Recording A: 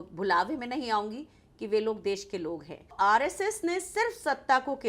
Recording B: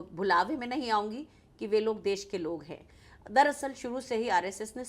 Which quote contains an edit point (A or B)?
A